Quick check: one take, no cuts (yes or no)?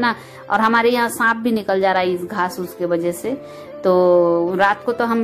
yes